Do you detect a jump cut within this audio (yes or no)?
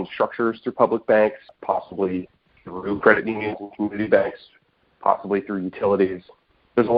no